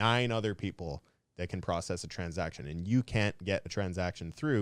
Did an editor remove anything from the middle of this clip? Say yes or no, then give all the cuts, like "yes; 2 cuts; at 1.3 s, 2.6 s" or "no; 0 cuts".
no; 0 cuts